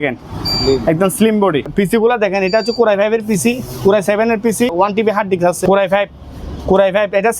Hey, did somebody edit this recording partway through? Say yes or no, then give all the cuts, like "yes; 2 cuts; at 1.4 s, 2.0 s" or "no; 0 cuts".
yes; 3 cuts; at 1.7 s, 4.7 s, 5.6 s